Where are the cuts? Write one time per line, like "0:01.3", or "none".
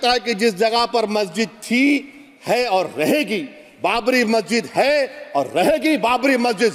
none